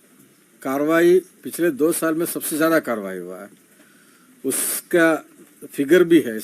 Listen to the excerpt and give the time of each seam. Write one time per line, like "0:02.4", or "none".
none